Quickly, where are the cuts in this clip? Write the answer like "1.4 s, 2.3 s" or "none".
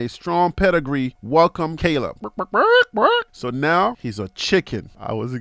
1.7 s

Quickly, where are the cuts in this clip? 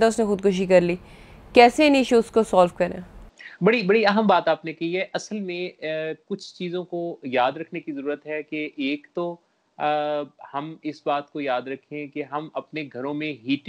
none

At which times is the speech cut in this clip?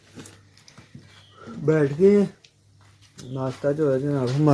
none

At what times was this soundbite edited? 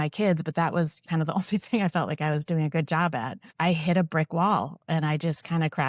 1.0 s, 3.3 s

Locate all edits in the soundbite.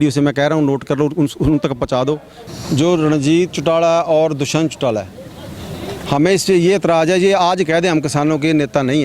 2.3 s

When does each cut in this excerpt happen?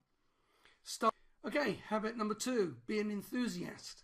1.1 s

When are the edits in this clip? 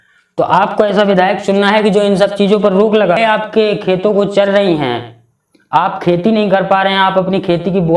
3.2 s

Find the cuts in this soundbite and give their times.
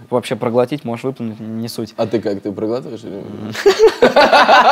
none

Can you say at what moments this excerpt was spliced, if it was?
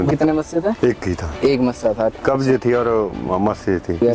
2.2 s

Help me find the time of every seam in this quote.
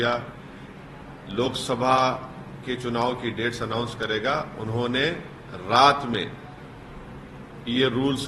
none

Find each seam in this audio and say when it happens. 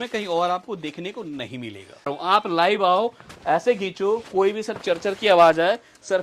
2.1 s

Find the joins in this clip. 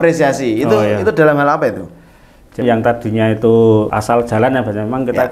2.6 s, 3.9 s

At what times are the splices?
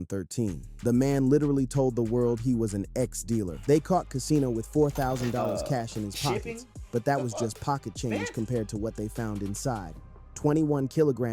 3.5 s

